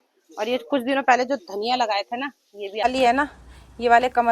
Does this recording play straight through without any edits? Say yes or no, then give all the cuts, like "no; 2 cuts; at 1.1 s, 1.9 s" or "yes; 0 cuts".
no; 1 cut; at 2.8 s